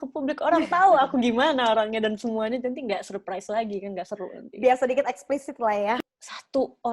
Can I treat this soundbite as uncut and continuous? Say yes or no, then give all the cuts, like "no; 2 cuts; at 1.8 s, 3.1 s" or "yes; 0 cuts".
no; 1 cut; at 6.0 s